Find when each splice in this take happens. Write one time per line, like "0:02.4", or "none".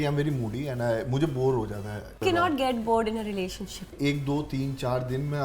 0:02.2
0:03.9